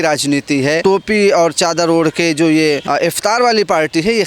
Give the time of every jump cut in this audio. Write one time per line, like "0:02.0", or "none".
0:00.8
0:02.8